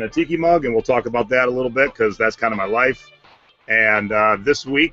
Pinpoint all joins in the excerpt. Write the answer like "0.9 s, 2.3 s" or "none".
none